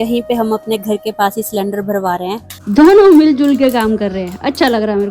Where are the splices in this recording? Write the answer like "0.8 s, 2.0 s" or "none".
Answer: 2.5 s